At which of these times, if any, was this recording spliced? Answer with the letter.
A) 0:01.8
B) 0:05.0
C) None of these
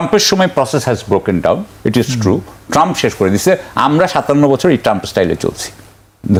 C